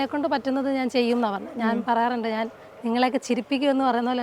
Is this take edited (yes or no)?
no